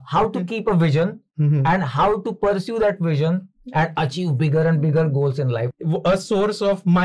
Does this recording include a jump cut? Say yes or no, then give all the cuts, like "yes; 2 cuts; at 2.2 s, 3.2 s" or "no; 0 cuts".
yes; 1 cut; at 5.7 s